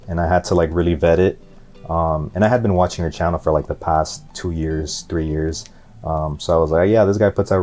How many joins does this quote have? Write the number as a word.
zero